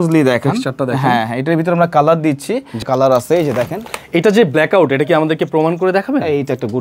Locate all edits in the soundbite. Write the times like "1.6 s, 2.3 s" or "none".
2.9 s